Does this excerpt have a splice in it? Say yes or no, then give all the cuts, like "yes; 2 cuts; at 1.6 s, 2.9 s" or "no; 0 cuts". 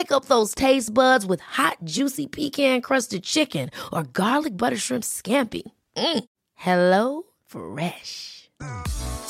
no; 0 cuts